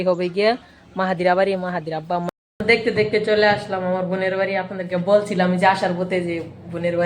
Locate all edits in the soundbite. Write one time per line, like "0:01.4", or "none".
0:02.3